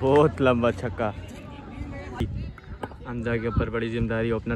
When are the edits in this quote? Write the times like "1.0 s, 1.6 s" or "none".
2.2 s